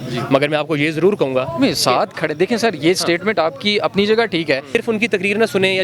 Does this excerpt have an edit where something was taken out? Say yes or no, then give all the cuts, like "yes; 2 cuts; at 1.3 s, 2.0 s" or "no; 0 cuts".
yes; 1 cut; at 4.8 s